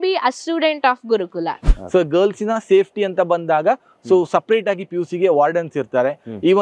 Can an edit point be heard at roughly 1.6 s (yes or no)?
yes